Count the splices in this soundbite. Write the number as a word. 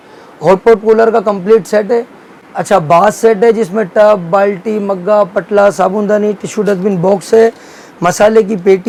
zero